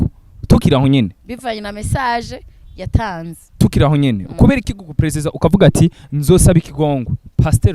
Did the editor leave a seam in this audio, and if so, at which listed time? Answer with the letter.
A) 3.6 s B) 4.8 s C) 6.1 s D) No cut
A